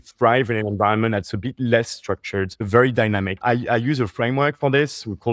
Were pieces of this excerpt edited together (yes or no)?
yes